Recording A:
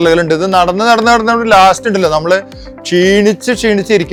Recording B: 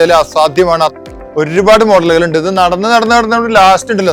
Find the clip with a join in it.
B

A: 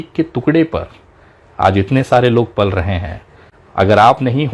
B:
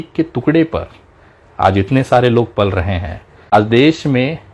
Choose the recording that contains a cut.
B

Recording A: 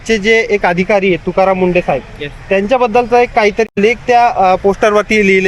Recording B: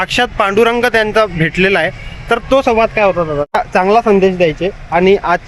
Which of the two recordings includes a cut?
B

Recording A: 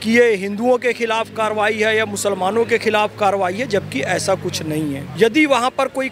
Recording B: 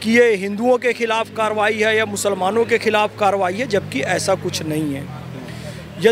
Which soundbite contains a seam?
A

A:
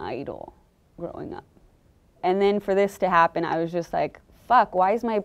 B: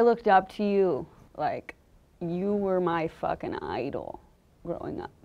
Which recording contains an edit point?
B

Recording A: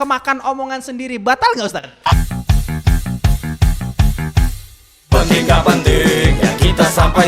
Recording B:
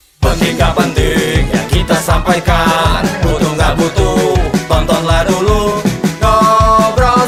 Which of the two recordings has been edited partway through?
A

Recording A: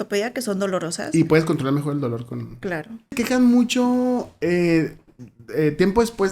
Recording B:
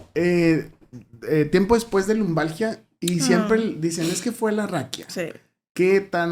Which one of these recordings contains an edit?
A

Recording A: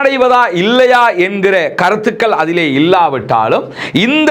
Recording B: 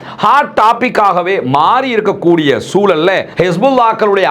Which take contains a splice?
B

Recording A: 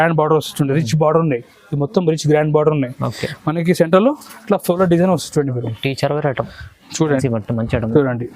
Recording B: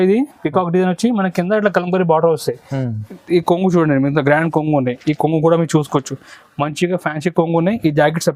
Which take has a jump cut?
A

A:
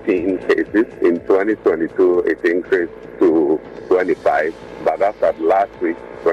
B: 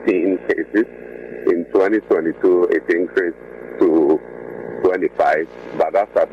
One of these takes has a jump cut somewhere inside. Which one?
A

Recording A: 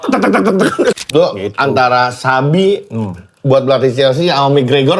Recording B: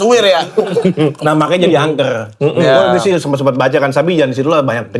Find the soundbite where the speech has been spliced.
A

